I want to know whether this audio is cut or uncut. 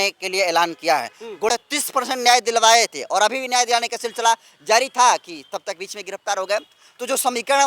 cut